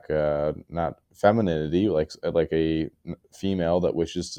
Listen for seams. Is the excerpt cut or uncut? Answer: uncut